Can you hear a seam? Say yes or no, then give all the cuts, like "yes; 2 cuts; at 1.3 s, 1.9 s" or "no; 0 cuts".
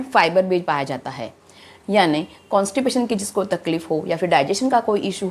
no; 0 cuts